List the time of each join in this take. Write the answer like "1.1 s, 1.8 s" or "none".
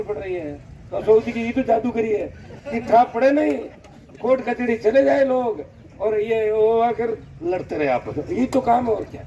none